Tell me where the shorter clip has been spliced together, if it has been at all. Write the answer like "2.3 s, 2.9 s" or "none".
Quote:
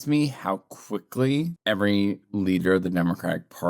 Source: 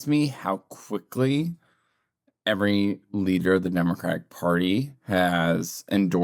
1.6 s